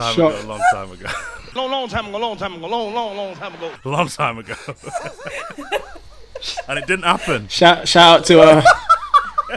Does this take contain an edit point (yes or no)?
no